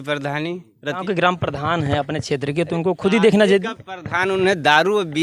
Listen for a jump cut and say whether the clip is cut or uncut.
cut